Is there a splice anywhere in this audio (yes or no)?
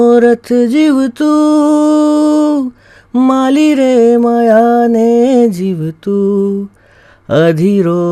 no